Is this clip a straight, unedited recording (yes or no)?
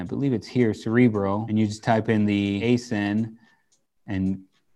no